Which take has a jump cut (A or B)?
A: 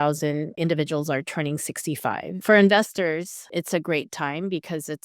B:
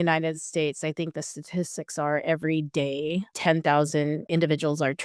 A